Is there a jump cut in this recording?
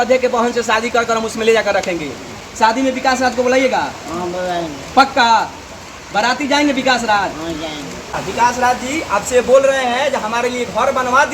yes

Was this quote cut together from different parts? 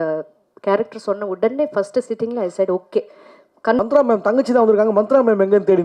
yes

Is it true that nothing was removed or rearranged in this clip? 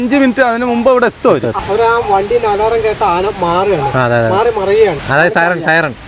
no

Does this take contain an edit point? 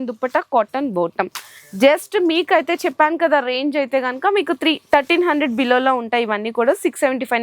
no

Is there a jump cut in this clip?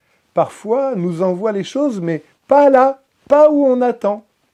no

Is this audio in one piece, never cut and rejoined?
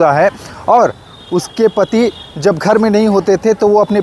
yes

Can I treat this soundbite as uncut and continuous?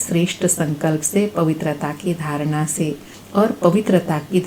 yes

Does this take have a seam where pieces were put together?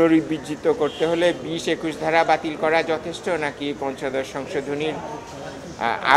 no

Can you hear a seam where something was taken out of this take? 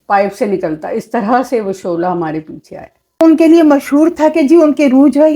yes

